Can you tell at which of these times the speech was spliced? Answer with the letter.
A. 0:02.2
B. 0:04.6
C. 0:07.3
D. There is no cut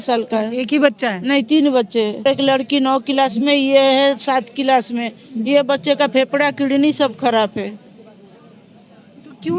A